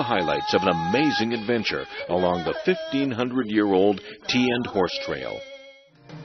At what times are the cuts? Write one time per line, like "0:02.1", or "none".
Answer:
0:02.9